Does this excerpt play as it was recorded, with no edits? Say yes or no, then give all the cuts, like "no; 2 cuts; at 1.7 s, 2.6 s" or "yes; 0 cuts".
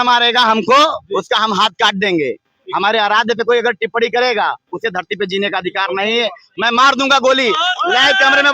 yes; 0 cuts